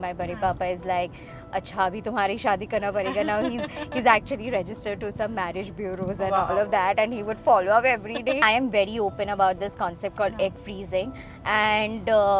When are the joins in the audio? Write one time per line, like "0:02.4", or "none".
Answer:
0:08.4